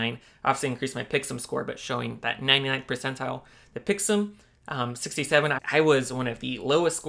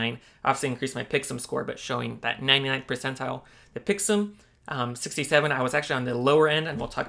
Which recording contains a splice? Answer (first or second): first